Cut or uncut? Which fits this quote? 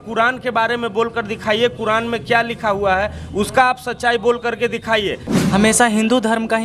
cut